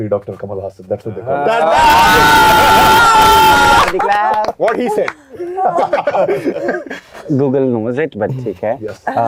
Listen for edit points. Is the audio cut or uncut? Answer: uncut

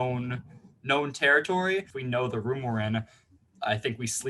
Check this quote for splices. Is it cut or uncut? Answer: cut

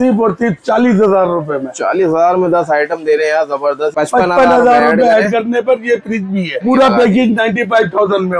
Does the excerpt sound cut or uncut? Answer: cut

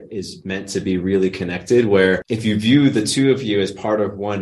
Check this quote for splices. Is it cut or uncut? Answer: cut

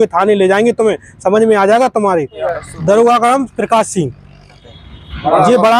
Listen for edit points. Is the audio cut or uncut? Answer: cut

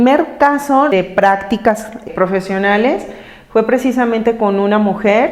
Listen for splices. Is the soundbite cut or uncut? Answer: cut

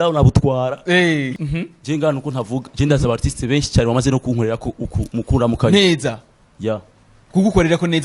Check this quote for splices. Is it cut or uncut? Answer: cut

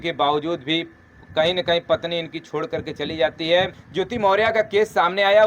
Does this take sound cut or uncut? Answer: cut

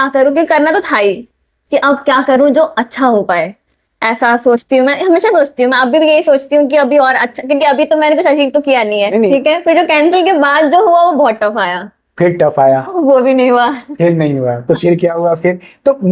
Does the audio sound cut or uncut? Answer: cut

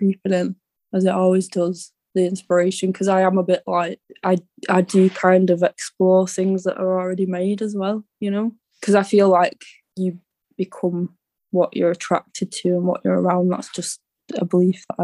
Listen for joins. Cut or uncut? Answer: uncut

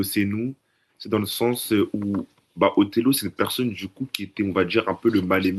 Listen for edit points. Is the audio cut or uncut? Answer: uncut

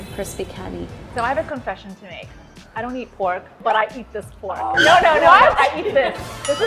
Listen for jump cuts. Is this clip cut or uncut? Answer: uncut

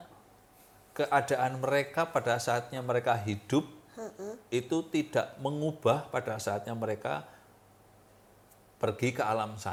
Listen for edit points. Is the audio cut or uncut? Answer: uncut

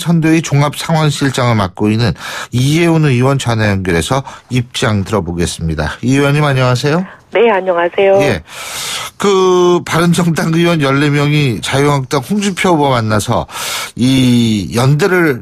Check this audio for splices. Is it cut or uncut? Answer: uncut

